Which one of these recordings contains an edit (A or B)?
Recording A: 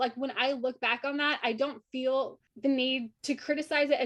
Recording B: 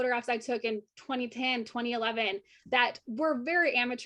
A